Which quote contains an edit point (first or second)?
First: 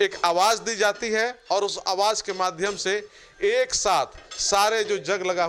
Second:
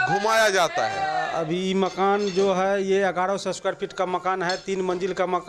second